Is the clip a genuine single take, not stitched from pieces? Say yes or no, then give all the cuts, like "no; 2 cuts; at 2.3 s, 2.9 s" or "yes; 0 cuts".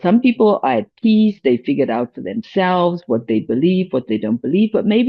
yes; 0 cuts